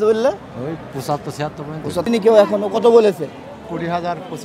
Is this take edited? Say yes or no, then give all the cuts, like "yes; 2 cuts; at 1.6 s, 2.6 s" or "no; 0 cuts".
yes; 1 cut; at 2.1 s